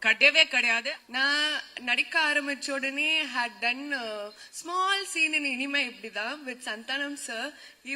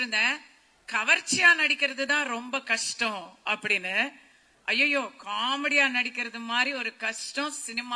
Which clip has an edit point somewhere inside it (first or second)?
first